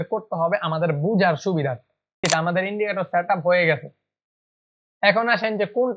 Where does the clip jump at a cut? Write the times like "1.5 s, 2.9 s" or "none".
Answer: 2.2 s